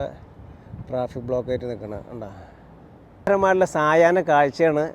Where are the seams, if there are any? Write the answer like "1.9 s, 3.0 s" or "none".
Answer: 3.3 s